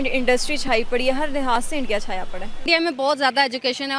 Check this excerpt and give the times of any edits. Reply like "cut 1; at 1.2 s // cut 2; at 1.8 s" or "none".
cut 1; at 2.7 s